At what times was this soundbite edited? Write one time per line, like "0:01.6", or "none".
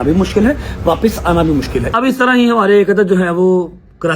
0:01.9